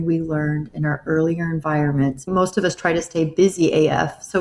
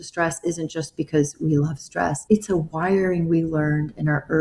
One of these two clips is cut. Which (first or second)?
first